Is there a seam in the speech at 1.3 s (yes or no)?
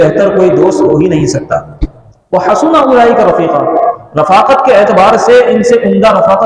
no